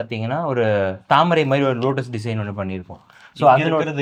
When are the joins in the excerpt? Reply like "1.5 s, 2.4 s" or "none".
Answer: none